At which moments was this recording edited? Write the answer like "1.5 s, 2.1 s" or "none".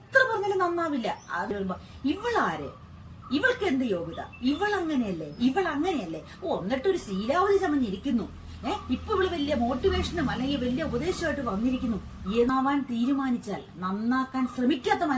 1.5 s, 12.5 s